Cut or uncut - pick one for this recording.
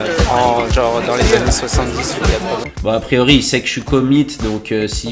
cut